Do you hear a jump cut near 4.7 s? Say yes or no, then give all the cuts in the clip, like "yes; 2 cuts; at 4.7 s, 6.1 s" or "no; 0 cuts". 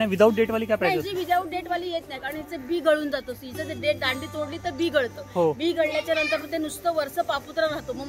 no; 0 cuts